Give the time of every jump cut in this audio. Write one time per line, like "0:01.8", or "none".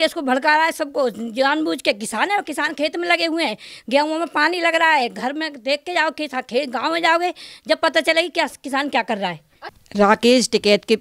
0:09.6